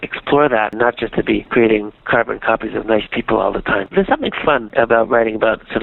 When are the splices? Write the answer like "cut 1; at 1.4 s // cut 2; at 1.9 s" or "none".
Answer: cut 1; at 0.7 s // cut 2; at 2.0 s // cut 3; at 3.9 s